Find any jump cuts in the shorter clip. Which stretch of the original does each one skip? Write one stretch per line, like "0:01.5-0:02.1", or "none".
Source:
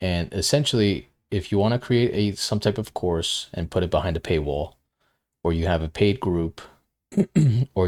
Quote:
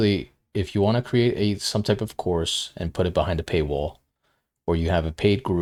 none